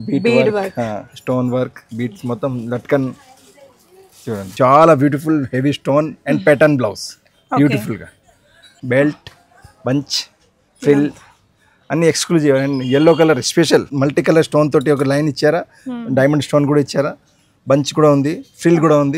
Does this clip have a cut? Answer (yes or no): yes